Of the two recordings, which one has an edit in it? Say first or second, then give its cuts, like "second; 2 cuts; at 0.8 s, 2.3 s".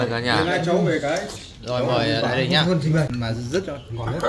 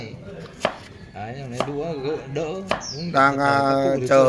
first; 1 cut; at 3.1 s